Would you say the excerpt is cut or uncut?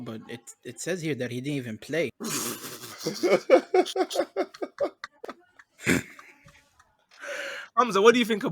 cut